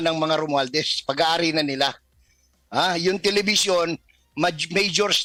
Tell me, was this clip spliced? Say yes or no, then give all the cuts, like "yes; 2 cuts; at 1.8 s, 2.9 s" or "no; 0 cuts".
no; 0 cuts